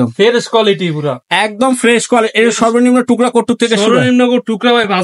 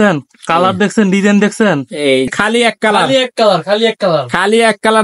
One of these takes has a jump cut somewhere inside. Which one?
second; 1 cut; at 2.3 s

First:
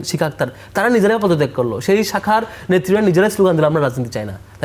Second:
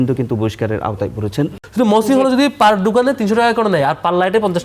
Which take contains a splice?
second; 1 cut; at 1.6 s

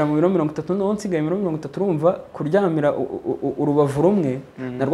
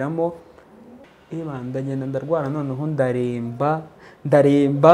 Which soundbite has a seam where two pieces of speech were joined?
second; 1 cut; at 1.0 s

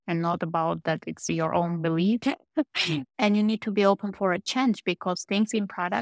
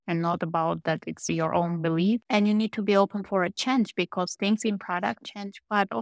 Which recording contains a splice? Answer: second; 1 cut; at 2.2 s

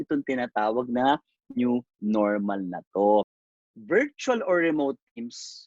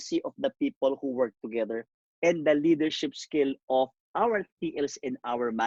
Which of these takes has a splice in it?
first; 1 cut; at 3.4 s

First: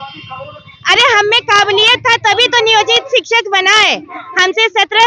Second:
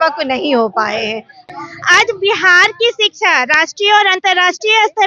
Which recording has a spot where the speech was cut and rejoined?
second; 1 cut; at 1.4 s

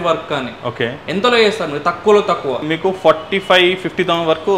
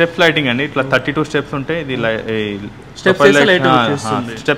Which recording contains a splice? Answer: first; 1 cut; at 2.6 s

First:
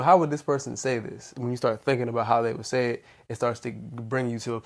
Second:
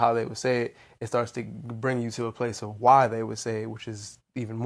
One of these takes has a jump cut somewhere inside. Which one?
first; 1 cut; at 1.3 s

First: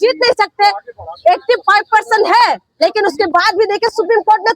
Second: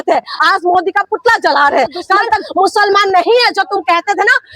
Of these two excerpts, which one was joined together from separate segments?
second; 1 cut; at 2.4 s

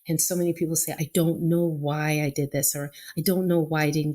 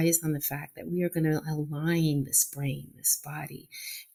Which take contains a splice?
first; 1 cut; at 1.0 s

